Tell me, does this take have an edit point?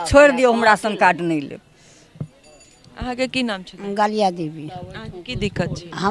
no; 0 cuts

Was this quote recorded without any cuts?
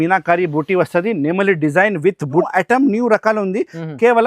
no; 1 cut; at 2.5 s

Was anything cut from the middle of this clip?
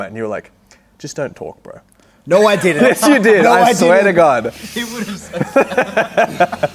no; 0 cuts

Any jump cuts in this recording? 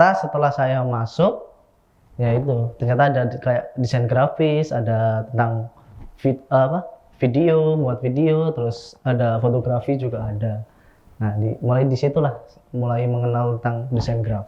no; 0 cuts

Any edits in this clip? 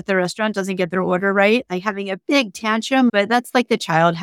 yes; 1 cut; at 3.1 s

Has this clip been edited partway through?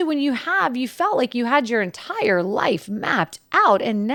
no; 0 cuts

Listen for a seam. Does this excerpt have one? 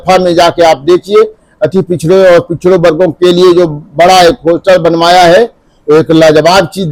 no; 0 cuts

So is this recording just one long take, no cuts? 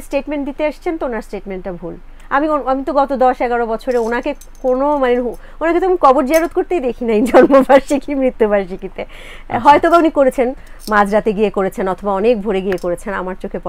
yes; 0 cuts

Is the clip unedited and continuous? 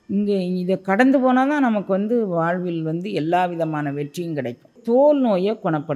no; 1 cut; at 4.8 s

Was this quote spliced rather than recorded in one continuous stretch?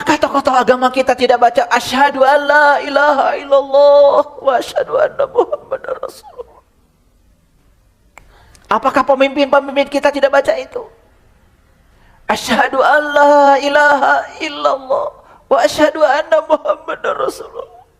yes; 1 cut; at 8.2 s

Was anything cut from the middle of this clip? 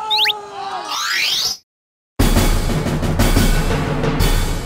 no; 0 cuts

